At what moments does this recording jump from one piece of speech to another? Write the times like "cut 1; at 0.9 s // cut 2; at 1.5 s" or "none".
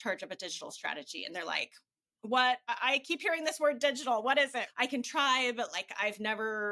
cut 1; at 4.7 s